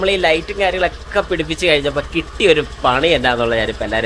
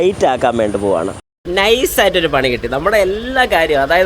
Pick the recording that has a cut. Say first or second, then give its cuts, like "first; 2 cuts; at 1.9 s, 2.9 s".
second; 1 cut; at 1.3 s